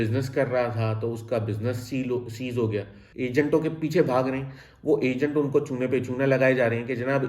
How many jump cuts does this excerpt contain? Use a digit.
1